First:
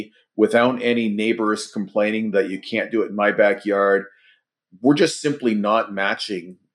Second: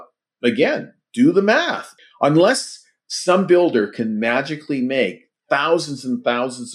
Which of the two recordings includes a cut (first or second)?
second